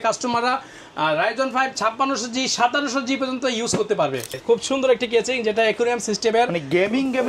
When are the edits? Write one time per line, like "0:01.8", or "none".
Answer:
0:04.4